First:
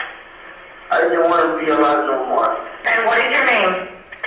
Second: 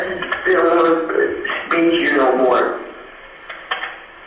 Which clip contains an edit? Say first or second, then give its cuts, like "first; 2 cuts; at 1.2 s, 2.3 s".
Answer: first; 1 cut; at 2.8 s